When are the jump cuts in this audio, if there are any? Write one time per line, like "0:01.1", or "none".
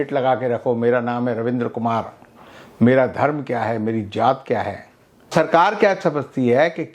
0:05.3